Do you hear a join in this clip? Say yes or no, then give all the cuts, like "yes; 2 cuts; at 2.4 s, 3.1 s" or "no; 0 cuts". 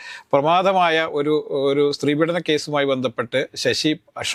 no; 0 cuts